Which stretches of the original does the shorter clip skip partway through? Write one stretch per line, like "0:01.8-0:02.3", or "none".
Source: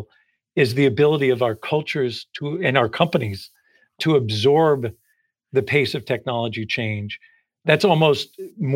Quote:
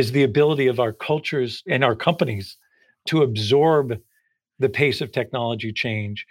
0:02.2-0:02.5